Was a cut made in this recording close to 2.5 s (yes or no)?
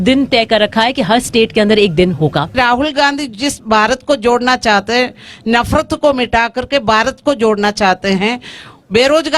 yes